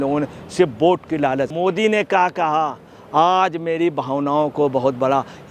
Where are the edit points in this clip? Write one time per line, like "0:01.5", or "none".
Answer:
0:01.5